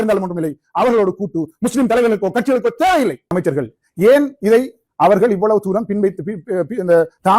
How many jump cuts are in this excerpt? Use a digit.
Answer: 1